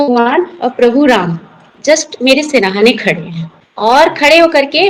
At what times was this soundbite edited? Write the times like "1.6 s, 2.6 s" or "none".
none